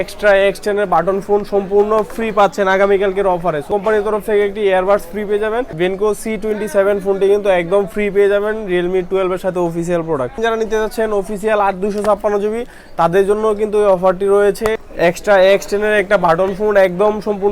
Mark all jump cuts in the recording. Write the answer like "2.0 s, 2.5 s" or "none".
3.7 s, 6.1 s, 10.4 s, 14.8 s